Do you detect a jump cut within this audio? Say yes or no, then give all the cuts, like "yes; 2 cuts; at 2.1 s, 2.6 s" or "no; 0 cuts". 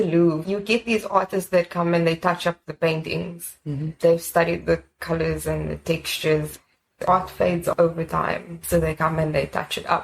no; 0 cuts